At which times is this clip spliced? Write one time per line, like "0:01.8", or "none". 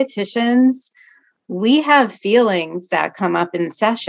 none